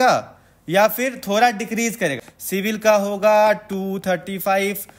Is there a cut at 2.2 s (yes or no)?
yes